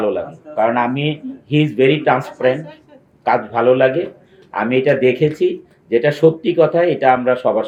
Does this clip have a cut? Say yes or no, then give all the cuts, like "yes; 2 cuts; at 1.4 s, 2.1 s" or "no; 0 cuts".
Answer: no; 0 cuts